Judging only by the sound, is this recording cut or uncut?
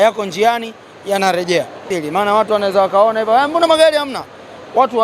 cut